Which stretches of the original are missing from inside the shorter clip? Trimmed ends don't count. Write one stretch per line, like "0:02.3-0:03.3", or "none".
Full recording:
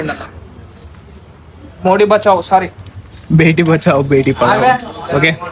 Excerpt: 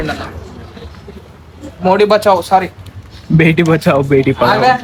none